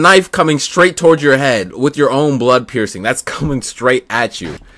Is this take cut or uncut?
uncut